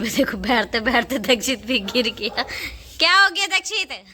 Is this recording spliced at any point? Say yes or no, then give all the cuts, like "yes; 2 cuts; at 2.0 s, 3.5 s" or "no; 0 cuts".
no; 0 cuts